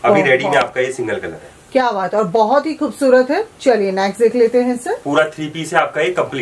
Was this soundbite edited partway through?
no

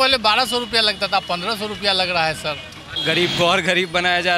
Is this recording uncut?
no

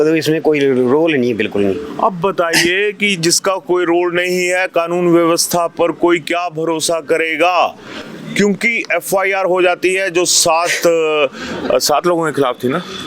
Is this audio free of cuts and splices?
yes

